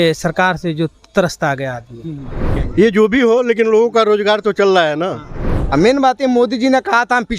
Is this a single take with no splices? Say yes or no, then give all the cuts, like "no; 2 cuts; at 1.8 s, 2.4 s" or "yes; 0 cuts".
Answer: no; 2 cuts; at 2.6 s, 5.5 s